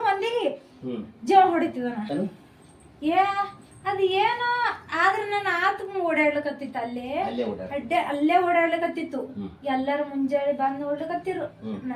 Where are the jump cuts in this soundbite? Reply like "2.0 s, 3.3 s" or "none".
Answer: 2.1 s

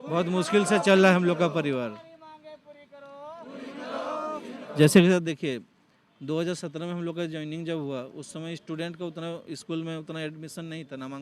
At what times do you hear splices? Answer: none

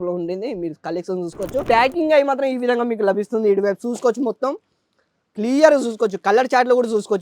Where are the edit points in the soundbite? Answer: 1.6 s

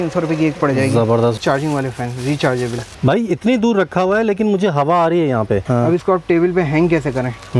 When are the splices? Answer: 1.4 s, 2.9 s, 5.7 s

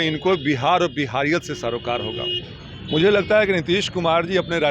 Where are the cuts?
none

